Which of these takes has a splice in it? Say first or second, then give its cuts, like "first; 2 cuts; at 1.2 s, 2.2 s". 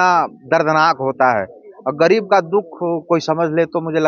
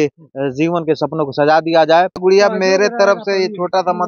second; 1 cut; at 2.2 s